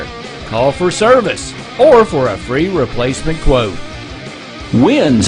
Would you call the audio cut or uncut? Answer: uncut